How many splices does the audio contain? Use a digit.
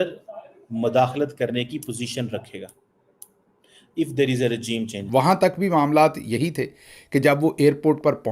1